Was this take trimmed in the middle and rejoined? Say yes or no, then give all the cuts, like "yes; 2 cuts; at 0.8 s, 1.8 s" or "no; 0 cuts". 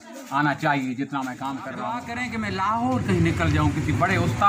yes; 1 cut; at 2.1 s